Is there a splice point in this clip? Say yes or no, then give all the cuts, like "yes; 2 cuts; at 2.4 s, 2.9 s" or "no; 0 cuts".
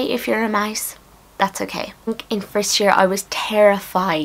yes; 1 cut; at 2.1 s